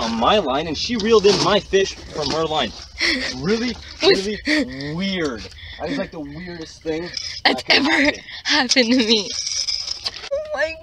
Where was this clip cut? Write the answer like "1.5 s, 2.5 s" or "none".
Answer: none